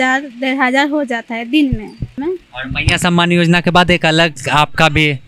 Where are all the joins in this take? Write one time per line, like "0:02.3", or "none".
0:02.1